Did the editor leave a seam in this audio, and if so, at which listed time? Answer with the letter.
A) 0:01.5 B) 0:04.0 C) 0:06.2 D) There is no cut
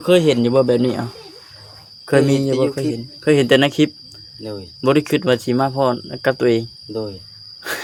D